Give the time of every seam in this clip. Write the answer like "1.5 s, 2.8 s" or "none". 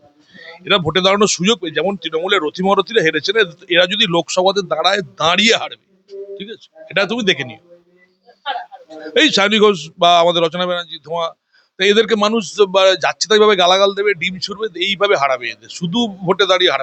none